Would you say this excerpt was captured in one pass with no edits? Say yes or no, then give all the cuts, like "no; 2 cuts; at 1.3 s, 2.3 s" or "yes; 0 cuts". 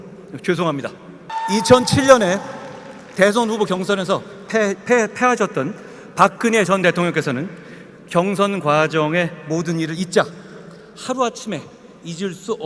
no; 1 cut; at 1.3 s